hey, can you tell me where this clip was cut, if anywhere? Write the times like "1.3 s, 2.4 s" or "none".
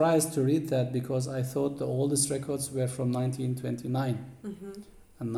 none

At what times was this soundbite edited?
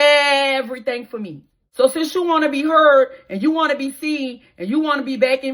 1.6 s

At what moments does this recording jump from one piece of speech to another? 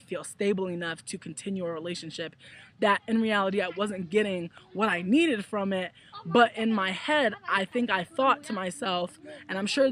7.4 s

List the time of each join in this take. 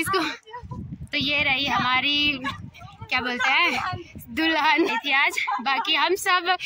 4.9 s

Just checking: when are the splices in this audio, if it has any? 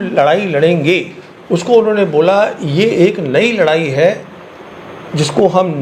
none

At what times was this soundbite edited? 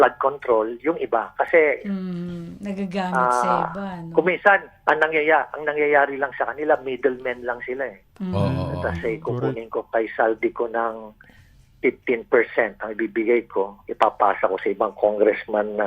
none

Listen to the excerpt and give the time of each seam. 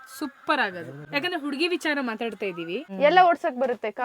1.0 s, 2.9 s

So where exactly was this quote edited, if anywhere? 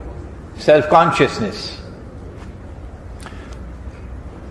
1.4 s

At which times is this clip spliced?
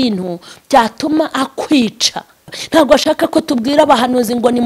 2.5 s

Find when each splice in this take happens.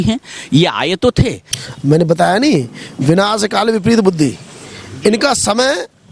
1.5 s

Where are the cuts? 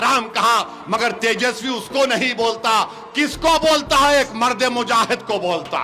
none

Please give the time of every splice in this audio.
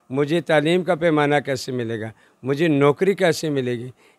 none

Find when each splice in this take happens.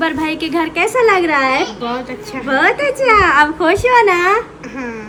none

